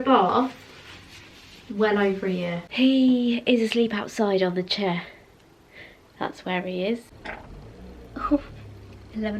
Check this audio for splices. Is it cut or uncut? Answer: cut